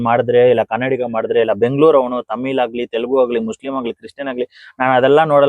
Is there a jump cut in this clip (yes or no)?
no